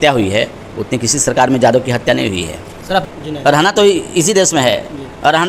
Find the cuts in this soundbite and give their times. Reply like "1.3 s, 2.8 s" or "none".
3.0 s